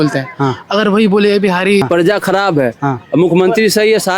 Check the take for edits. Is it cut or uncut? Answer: cut